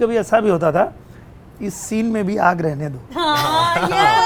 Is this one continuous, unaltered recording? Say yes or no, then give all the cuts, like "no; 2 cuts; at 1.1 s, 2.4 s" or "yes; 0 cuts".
yes; 0 cuts